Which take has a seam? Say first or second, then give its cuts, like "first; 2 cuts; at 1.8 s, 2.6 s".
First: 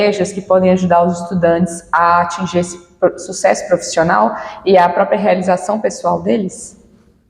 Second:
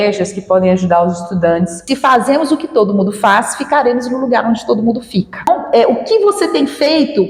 second; 2 cuts; at 1.8 s, 5.5 s